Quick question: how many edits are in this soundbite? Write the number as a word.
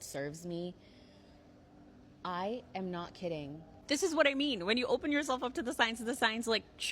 two